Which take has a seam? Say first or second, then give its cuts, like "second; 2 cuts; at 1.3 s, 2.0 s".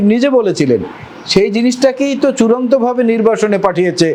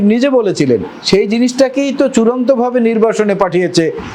second; 1 cut; at 0.9 s